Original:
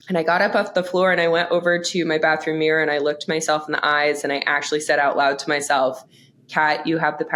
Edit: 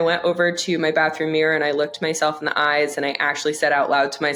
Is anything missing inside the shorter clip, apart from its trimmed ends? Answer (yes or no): no